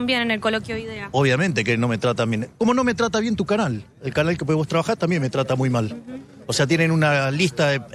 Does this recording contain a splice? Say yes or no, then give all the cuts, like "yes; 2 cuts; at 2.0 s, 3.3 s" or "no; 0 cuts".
no; 0 cuts